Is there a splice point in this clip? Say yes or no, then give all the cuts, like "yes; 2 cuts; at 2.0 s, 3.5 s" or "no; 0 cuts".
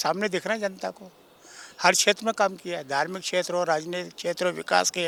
no; 0 cuts